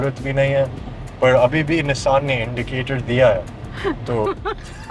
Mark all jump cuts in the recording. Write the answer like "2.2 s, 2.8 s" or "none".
none